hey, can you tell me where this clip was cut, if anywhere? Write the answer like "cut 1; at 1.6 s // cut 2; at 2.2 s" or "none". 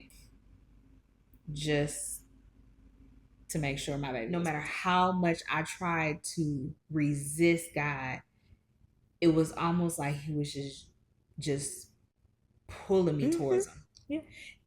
cut 1; at 4.3 s

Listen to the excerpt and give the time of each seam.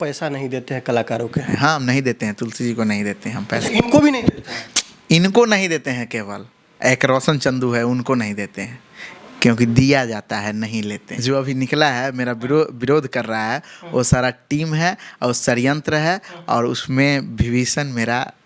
cut 1; at 1.5 s // cut 2; at 3.6 s // cut 3; at 11.2 s

